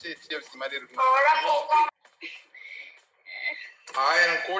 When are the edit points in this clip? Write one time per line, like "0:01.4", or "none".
0:01.9